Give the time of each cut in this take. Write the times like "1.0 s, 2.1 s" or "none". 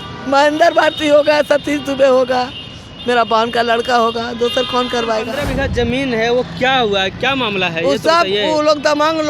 5.4 s

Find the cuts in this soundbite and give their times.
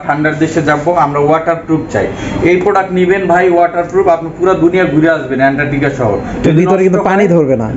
none

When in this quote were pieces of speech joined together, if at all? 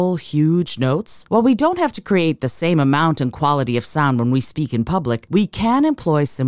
1.1 s, 5.2 s

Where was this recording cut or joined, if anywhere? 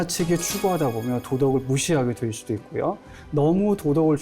3.2 s

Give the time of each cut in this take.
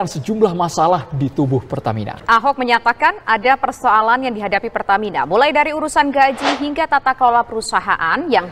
none

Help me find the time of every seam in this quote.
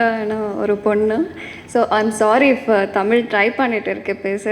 none

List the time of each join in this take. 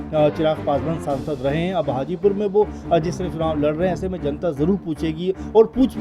none

